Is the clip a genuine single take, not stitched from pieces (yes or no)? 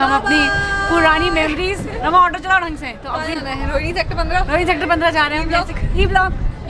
yes